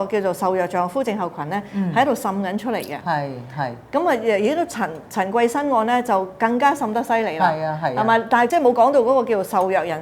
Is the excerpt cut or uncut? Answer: cut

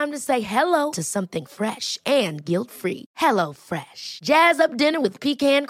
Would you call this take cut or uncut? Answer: uncut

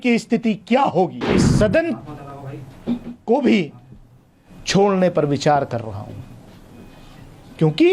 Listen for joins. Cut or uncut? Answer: cut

